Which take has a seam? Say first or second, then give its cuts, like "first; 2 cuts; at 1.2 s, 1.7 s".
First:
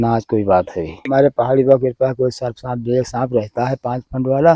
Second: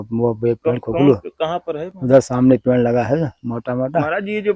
first; 1 cut; at 1.1 s